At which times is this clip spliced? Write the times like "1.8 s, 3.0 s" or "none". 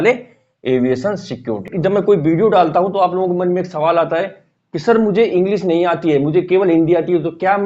1.7 s